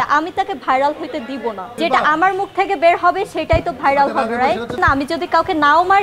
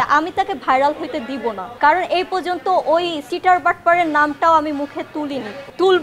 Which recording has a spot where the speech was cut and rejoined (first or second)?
first